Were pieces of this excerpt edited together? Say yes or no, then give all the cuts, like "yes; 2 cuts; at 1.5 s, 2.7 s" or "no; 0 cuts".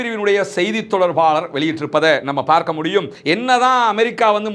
yes; 1 cut; at 3.2 s